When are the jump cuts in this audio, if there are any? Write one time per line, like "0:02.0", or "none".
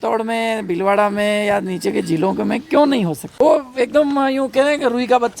0:03.3